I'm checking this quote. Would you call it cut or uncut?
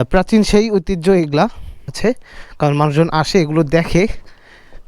cut